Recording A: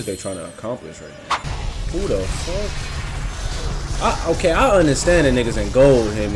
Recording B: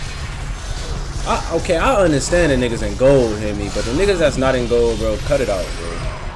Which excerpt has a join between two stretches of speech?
A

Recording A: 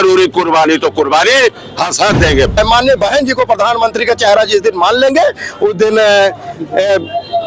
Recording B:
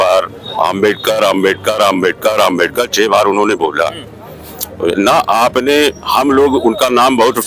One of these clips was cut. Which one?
A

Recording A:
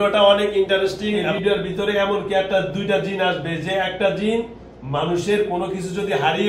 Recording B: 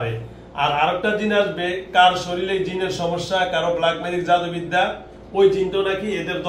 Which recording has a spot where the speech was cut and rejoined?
A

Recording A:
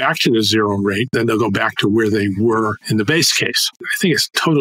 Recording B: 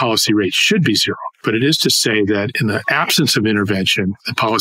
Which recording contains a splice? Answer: A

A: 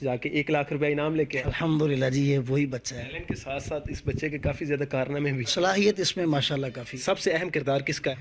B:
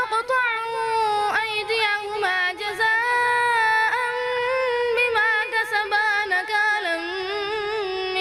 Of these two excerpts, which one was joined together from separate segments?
A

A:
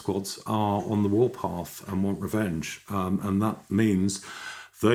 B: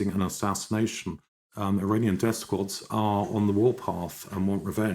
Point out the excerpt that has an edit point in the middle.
B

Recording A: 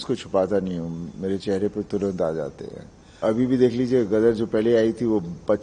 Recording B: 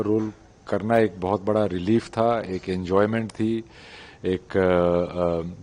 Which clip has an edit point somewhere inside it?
A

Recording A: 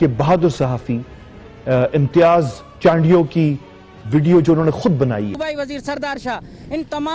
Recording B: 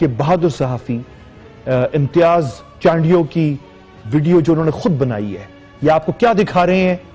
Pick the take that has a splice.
A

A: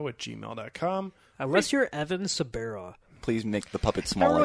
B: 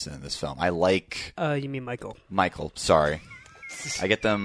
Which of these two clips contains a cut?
A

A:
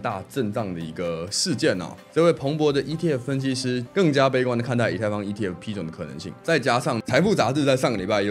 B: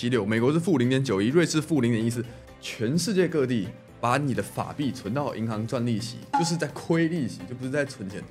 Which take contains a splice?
A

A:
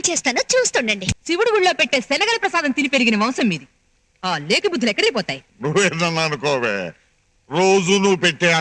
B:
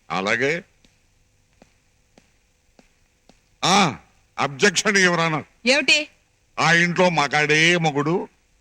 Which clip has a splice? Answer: A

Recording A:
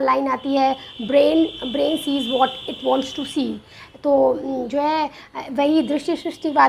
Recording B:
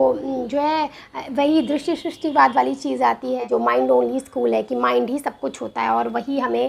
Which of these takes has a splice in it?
B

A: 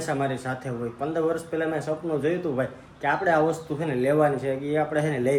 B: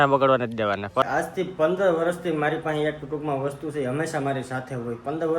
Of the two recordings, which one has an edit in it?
B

